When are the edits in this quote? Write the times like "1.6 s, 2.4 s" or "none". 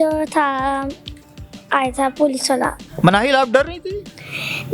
2.9 s